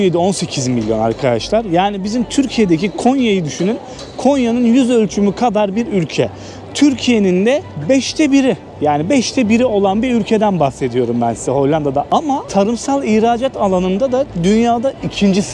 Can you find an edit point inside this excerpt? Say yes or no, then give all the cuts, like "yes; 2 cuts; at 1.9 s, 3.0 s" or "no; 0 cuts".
no; 0 cuts